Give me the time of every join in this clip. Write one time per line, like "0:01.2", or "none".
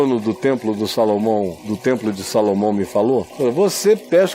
0:01.6
0:03.3